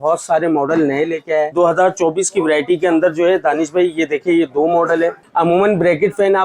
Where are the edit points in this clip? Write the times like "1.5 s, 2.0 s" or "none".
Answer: 1.5 s, 5.2 s